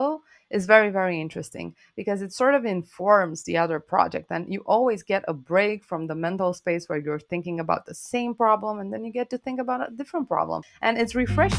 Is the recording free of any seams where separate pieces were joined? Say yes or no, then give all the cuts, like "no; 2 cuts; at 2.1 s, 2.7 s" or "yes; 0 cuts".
no; 1 cut; at 10.7 s